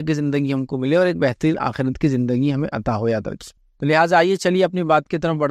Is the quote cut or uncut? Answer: uncut